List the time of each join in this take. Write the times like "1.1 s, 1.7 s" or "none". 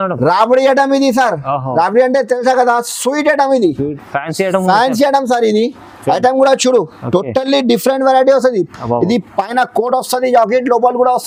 none